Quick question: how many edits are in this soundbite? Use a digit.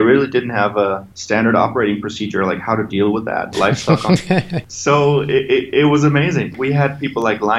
3